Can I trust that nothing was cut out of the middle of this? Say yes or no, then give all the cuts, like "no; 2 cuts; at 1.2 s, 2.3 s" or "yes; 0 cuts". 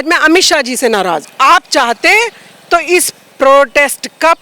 no; 1 cut; at 1.3 s